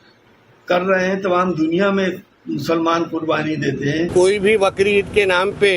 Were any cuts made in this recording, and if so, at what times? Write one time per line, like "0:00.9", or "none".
0:04.1